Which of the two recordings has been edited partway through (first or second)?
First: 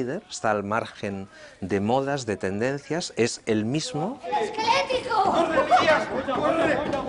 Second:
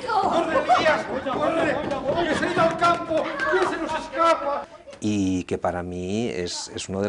second